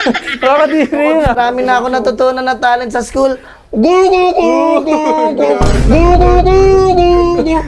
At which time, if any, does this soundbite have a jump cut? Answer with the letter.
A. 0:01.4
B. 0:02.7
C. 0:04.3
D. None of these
A